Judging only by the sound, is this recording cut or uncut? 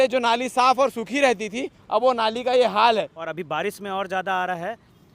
cut